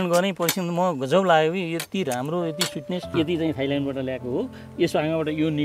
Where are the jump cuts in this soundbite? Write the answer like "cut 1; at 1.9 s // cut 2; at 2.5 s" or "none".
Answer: cut 1; at 3.1 s